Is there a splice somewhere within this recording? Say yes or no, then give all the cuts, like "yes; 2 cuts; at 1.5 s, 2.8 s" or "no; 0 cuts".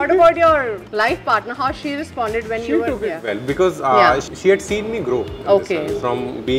yes; 2 cuts; at 0.8 s, 4.3 s